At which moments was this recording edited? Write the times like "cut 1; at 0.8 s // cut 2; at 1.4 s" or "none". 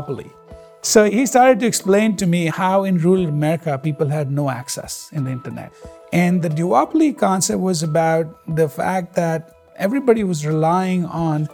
cut 1; at 5.7 s